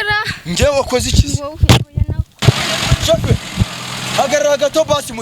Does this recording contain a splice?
yes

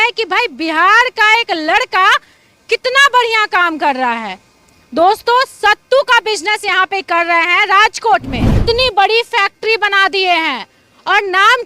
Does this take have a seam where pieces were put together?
yes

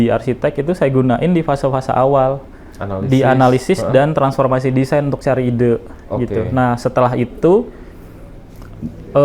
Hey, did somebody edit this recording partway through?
no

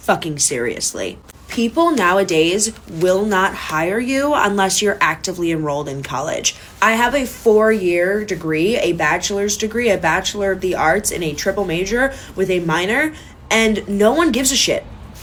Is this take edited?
no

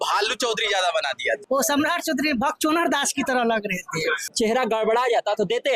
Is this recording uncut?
no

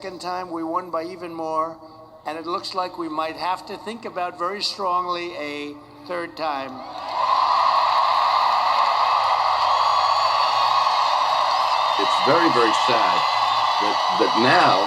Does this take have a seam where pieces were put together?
no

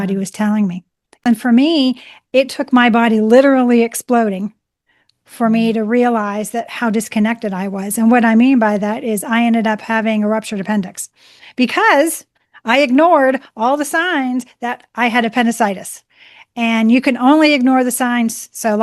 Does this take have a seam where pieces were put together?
yes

